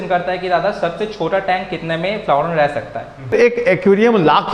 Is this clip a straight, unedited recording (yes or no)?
no